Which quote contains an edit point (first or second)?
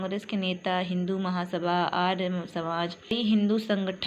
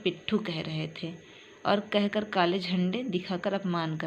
first